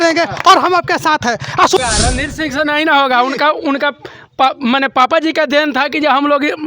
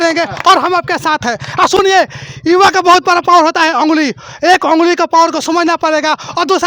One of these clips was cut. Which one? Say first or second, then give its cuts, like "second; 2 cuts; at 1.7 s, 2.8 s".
first; 1 cut; at 1.8 s